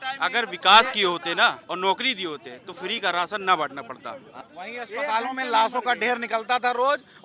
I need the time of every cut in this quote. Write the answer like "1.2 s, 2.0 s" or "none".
1.6 s, 4.3 s